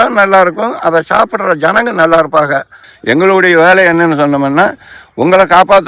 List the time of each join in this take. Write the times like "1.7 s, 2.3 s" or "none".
2.8 s